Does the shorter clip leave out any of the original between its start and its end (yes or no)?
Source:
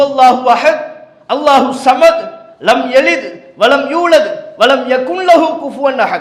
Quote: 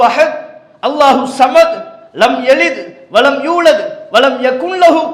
no